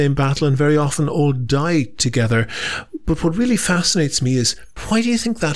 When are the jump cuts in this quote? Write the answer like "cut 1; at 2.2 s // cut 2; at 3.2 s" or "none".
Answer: cut 1; at 4.7 s